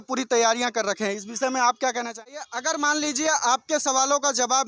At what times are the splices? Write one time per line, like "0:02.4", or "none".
0:02.3